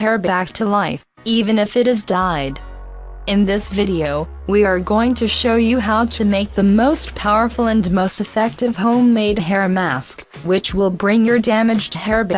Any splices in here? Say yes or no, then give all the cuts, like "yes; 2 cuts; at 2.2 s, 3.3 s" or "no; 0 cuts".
yes; 2 cuts; at 1.1 s, 10.1 s